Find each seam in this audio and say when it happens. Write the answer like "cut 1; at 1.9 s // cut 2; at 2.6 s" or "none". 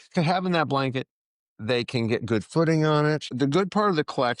cut 1; at 3.3 s